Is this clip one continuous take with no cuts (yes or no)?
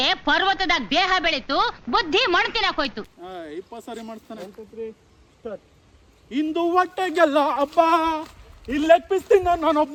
yes